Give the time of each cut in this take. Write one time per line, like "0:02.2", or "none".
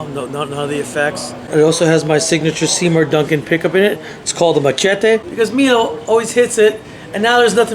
0:01.5
0:05.3

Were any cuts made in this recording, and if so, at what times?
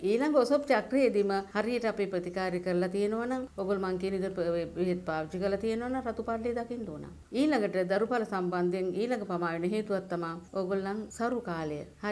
none

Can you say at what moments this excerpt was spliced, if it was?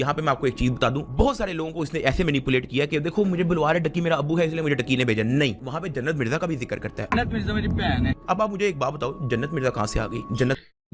none

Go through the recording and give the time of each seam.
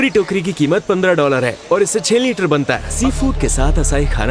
0:02.9

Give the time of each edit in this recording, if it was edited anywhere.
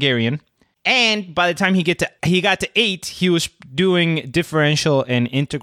0:02.2

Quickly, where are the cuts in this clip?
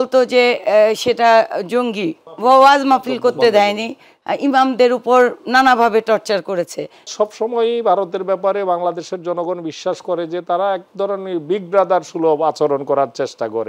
0:02.2
0:07.1

